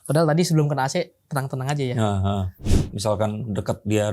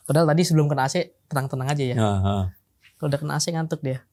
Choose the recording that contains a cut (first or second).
first